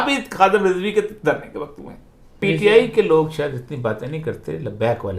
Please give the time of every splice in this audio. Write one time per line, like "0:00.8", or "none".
0:02.4